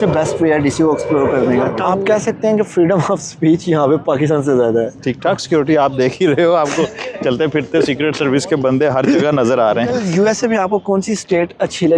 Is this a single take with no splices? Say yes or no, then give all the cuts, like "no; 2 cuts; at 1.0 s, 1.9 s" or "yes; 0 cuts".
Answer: no; 3 cuts; at 1.8 s, 5.0 s, 10.0 s